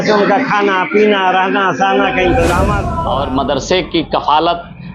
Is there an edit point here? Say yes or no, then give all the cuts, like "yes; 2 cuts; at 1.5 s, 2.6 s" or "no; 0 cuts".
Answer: yes; 1 cut; at 2.9 s